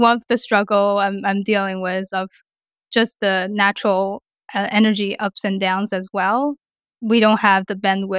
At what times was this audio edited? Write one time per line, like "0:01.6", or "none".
0:06.7